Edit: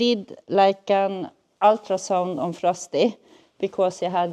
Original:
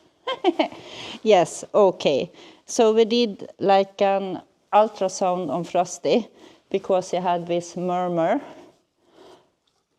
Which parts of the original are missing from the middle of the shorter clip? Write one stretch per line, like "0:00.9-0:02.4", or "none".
none